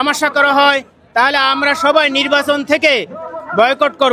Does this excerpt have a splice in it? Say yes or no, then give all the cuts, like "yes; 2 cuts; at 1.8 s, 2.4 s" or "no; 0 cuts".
no; 0 cuts